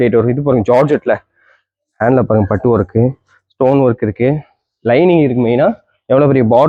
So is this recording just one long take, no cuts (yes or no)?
yes